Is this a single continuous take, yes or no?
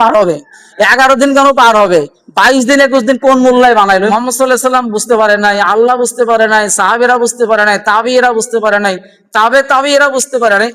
no